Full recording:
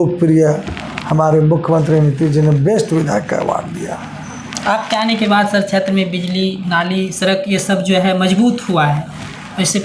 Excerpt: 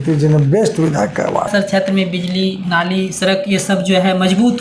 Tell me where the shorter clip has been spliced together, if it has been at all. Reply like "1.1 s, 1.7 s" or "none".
1.5 s